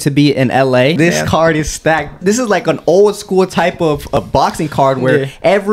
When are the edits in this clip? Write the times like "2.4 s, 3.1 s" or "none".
1.0 s, 2.2 s, 4.2 s